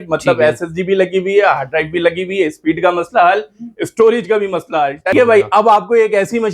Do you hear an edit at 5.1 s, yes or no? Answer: yes